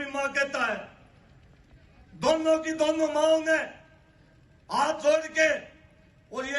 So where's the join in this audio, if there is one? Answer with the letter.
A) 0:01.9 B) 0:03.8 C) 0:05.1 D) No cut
D